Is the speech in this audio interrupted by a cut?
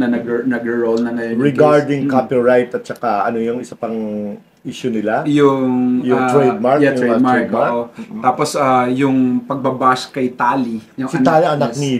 no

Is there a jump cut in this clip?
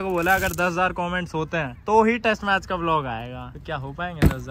no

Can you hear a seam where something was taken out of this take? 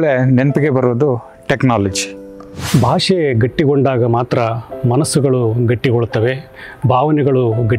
yes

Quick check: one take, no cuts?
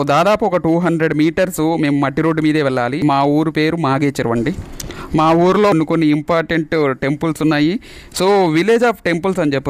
no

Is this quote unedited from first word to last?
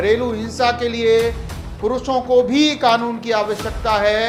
yes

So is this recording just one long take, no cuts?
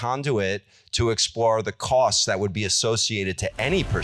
yes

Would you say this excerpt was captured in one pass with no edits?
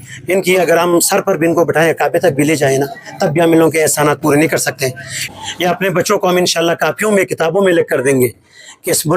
no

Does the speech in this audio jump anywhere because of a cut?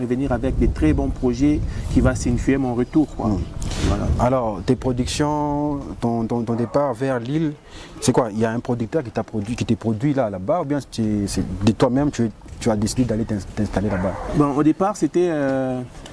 no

